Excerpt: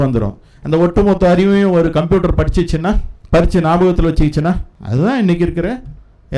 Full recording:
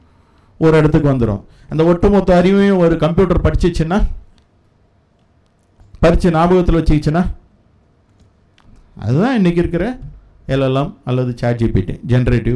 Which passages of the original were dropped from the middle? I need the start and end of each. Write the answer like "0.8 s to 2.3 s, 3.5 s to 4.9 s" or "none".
4.2 s to 5.8 s, 7.4 s to 8.9 s